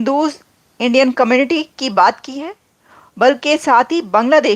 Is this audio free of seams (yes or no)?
yes